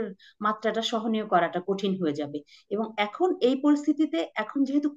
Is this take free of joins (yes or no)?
yes